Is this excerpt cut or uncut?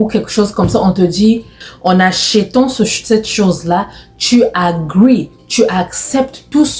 cut